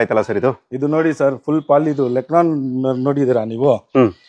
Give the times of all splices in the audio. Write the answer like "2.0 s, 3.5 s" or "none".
none